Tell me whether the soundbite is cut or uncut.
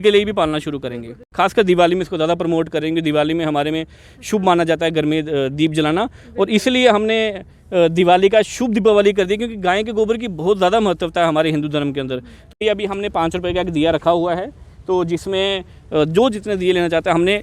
cut